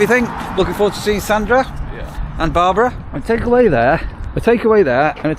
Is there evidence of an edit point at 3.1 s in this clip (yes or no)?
yes